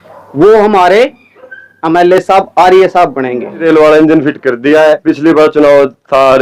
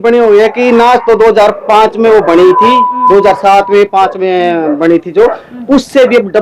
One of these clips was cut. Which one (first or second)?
first